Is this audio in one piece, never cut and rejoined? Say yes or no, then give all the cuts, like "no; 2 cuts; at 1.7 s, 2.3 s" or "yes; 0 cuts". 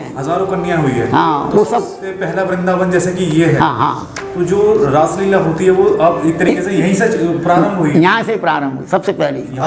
yes; 0 cuts